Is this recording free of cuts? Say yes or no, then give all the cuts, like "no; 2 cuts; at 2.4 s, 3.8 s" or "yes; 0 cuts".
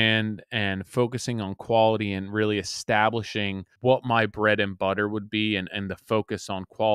no; 1 cut; at 3.6 s